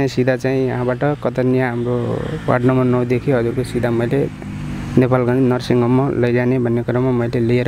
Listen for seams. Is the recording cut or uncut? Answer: uncut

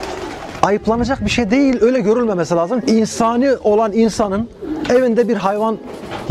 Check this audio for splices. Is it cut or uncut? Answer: cut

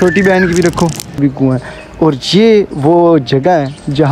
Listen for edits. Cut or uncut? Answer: cut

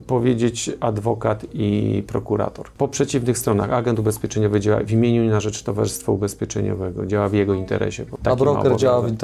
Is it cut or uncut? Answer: cut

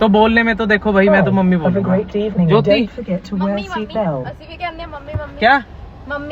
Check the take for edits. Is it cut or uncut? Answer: uncut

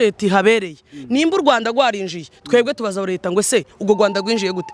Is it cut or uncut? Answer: uncut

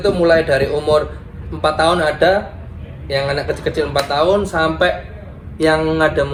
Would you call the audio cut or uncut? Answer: uncut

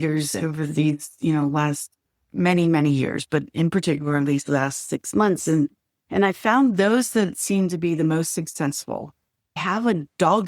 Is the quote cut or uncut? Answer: cut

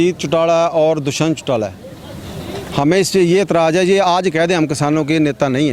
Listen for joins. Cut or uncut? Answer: uncut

